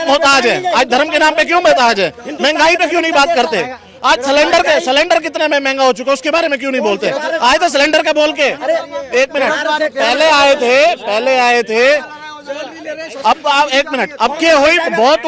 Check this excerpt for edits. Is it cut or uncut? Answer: uncut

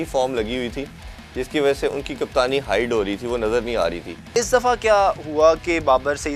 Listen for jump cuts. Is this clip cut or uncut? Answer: cut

